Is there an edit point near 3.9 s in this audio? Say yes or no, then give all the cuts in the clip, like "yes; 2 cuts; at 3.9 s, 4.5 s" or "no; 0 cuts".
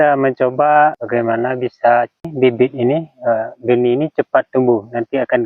no; 2 cuts; at 1.0 s, 2.3 s